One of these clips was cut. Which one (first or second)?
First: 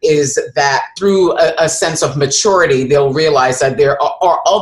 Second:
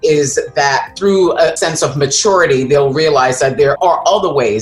second